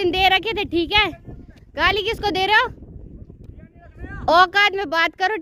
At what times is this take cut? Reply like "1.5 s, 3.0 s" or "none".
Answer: none